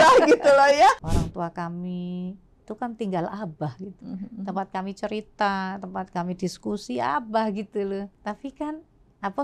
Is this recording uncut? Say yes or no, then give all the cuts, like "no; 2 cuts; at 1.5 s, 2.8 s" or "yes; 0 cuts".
no; 2 cuts; at 1.1 s, 8.1 s